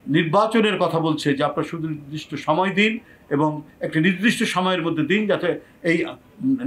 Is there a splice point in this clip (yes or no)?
no